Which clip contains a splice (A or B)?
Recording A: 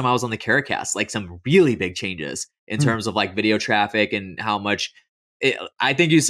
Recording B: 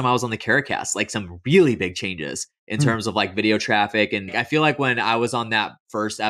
B